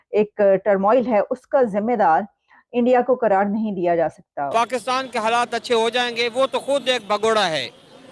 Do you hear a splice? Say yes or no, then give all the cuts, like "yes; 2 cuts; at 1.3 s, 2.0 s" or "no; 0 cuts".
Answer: yes; 1 cut; at 4.5 s